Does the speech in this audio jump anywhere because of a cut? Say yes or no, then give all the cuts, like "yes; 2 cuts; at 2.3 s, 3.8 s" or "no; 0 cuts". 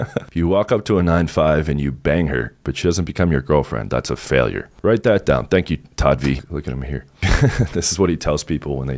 yes; 1 cut; at 6.4 s